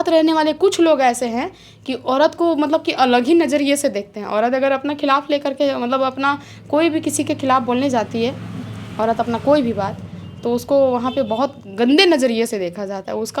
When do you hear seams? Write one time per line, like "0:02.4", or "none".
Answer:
none